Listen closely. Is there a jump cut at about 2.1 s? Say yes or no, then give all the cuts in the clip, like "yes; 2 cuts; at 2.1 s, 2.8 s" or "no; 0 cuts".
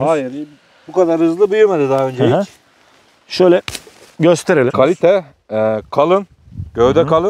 no; 1 cut; at 4.7 s